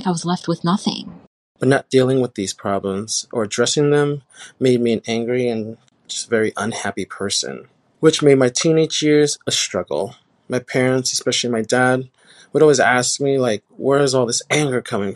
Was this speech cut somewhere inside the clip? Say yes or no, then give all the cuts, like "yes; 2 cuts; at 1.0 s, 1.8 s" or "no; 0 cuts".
yes; 1 cut; at 1.1 s